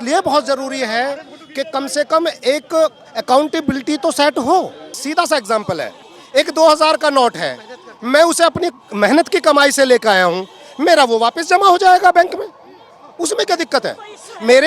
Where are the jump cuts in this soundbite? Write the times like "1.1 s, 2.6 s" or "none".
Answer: 4.9 s